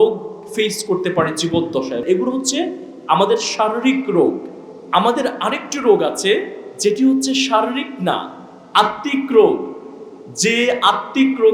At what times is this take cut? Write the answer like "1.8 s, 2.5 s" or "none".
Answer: 2.0 s